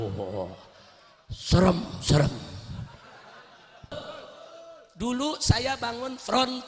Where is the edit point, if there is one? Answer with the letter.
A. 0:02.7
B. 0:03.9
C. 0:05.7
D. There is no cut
B